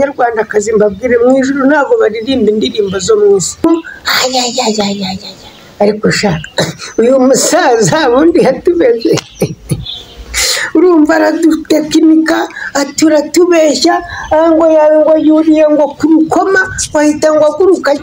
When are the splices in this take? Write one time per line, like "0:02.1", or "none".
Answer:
0:03.6